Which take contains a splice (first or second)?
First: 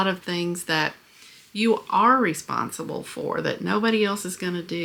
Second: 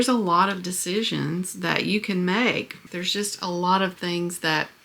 second